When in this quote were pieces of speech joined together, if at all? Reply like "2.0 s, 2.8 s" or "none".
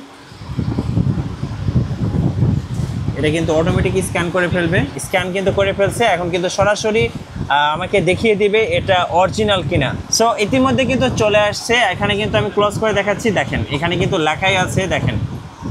5.0 s